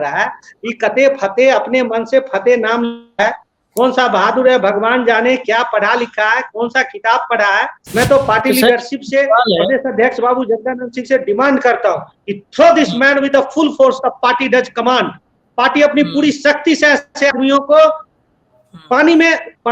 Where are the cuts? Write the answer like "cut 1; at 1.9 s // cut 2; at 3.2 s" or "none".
cut 1; at 7.8 s